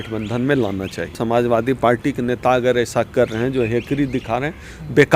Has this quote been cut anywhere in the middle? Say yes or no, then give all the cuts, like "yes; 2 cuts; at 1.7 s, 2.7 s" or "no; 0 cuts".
yes; 1 cut; at 1.1 s